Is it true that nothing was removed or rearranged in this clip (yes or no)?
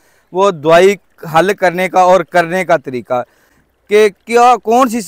yes